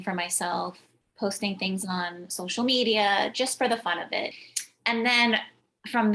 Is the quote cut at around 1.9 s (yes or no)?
no